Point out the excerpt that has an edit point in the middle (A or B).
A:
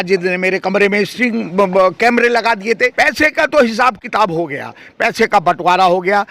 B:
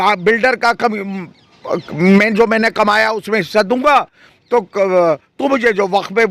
A